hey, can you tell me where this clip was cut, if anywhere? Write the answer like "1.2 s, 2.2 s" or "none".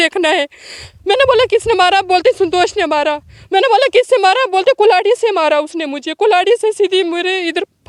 none